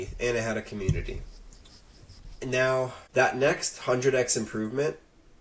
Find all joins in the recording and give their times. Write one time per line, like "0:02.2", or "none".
0:03.0